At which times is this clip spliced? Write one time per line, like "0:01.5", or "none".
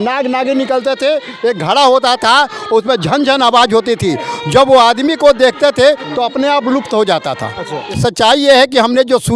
0:07.9

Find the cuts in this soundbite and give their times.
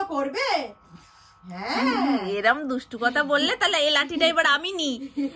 none

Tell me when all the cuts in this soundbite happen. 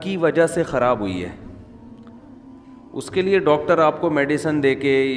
none

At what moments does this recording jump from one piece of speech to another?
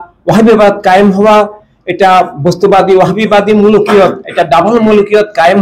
none

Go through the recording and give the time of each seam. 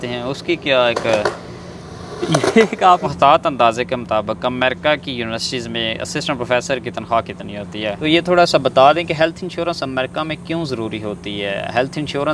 0:03.1
0:08.0

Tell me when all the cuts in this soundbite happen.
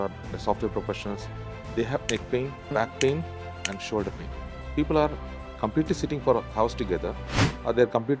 0:04.6

